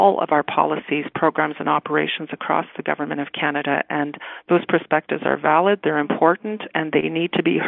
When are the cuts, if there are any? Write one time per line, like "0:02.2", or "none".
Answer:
none